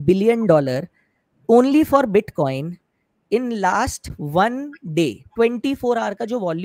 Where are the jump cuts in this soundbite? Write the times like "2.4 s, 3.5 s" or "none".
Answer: none